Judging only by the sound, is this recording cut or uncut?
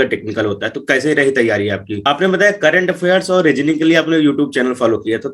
cut